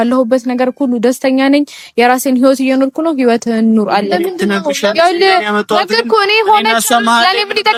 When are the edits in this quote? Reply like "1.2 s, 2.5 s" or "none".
none